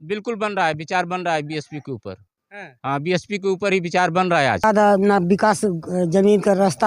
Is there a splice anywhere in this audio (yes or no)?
yes